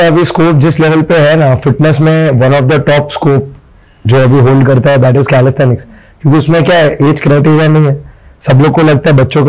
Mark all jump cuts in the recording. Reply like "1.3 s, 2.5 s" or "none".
none